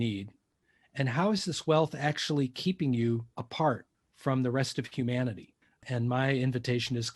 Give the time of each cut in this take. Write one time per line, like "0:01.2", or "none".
0:03.6
0:05.8